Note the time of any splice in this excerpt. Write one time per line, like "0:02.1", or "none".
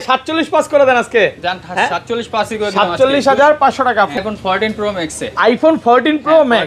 0:04.2